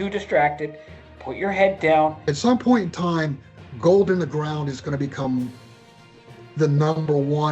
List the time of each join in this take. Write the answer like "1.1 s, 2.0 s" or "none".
2.2 s